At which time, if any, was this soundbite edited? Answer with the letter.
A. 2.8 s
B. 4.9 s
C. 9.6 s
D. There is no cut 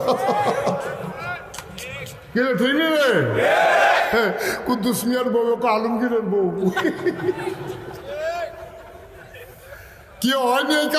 D